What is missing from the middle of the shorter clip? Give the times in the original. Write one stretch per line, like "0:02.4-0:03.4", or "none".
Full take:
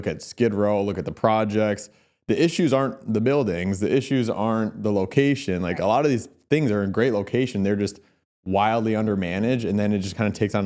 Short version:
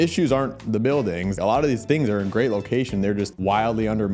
0:03.9-0:06.1
0:08.0-0:08.4